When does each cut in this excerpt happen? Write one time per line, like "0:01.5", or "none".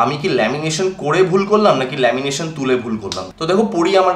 none